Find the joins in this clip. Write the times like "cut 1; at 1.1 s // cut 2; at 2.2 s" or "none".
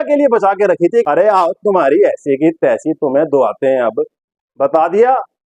cut 1; at 1.0 s